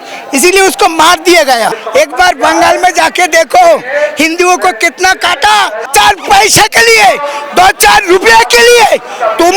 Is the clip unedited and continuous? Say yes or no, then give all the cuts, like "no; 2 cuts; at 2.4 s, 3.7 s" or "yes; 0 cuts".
no; 2 cuts; at 1.8 s, 5.9 s